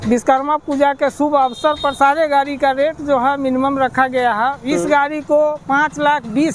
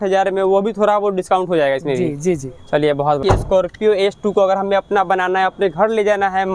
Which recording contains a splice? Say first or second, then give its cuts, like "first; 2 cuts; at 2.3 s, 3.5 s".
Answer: second; 1 cut; at 3.2 s